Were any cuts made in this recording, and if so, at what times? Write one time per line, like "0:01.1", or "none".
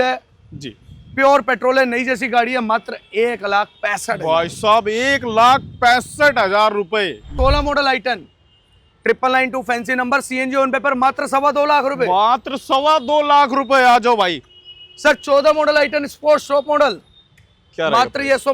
0:07.3